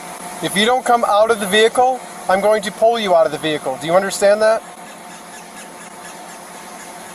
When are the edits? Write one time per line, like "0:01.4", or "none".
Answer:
none